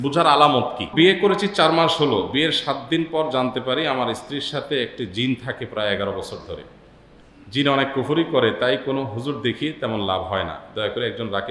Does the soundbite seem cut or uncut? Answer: cut